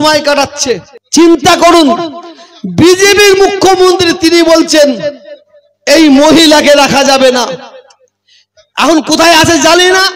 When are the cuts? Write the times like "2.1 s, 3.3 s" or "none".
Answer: 0.9 s